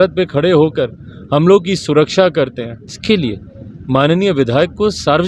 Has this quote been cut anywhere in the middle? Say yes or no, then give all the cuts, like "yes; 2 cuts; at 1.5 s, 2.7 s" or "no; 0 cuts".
yes; 1 cut; at 2.9 s